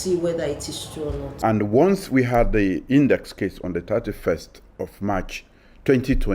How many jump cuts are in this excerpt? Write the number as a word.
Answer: one